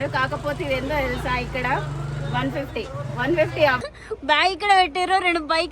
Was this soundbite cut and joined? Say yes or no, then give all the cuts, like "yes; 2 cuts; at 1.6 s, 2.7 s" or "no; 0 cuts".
yes; 1 cut; at 3.8 s